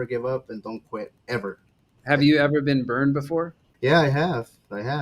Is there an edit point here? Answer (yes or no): yes